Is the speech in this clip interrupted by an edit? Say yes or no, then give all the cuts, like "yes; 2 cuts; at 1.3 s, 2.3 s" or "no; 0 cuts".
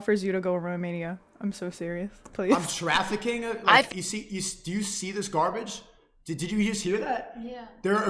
no; 0 cuts